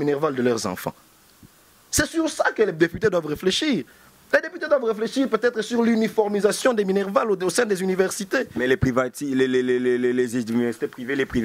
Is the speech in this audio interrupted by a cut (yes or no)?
no